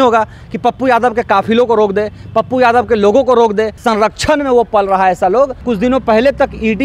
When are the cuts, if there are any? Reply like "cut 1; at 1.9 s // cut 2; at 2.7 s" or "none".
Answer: cut 1; at 3.7 s // cut 2; at 5.6 s

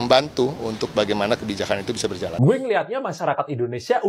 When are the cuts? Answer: cut 1; at 2.3 s

